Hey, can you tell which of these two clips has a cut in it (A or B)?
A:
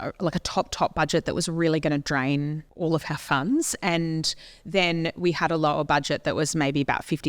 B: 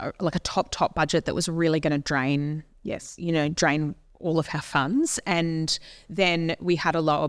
A